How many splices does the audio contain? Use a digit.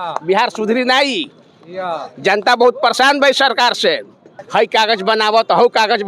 1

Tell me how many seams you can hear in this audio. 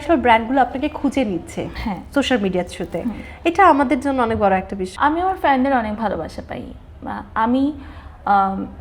1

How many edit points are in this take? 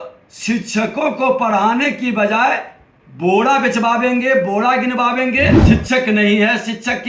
1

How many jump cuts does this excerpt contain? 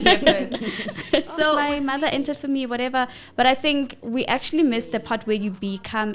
1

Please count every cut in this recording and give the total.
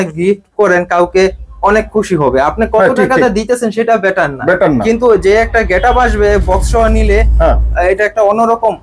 0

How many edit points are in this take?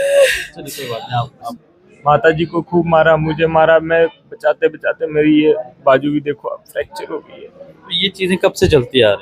1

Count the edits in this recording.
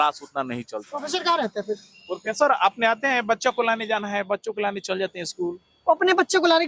1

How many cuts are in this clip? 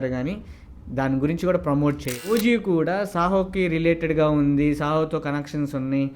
1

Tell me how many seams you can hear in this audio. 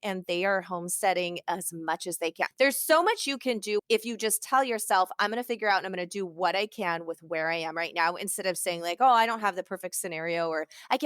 2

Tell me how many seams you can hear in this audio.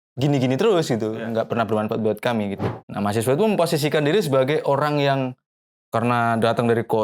1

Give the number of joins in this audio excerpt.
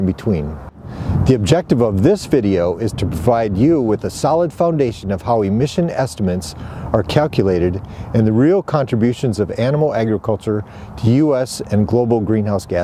1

